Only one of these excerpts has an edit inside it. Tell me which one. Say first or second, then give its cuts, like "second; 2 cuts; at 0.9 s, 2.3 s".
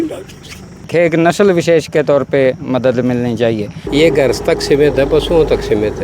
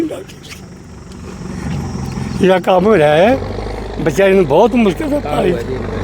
first; 2 cuts; at 0.9 s, 3.8 s